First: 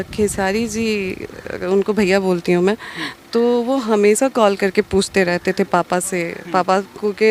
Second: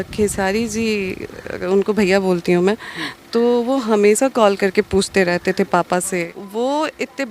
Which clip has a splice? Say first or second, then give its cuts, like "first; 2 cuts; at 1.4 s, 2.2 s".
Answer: second; 1 cut; at 6.4 s